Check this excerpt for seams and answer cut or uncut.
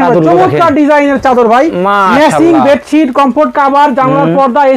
uncut